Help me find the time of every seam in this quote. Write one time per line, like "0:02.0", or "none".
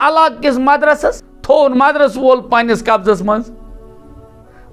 0:01.3